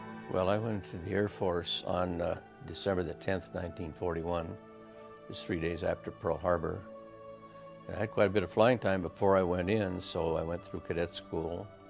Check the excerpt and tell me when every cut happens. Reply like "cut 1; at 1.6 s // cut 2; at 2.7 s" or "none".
cut 1; at 10.1 s